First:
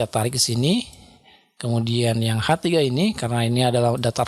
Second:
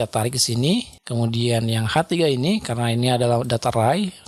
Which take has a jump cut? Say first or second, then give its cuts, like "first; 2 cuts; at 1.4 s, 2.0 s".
second; 1 cut; at 1.0 s